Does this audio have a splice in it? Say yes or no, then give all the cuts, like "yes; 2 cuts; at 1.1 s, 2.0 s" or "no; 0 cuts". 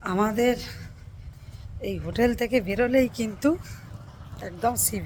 no; 0 cuts